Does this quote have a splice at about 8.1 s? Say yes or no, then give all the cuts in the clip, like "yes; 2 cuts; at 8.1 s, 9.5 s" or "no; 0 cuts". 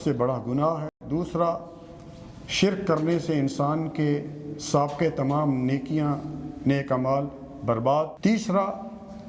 yes; 1 cut; at 8.1 s